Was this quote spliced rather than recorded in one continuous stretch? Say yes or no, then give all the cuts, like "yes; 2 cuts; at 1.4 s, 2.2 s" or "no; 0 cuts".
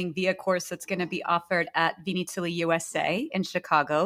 no; 0 cuts